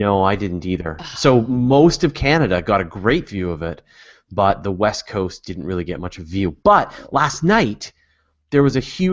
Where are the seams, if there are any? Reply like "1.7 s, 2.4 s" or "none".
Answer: none